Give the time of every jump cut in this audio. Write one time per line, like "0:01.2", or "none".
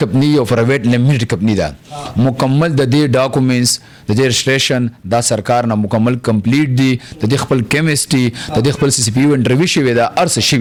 none